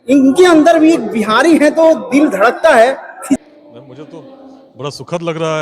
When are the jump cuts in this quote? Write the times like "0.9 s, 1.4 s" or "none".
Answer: 3.4 s